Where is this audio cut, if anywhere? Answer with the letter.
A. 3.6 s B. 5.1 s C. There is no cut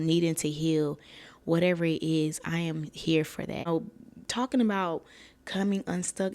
A